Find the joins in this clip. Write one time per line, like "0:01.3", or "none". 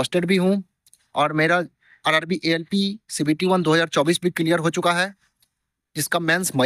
none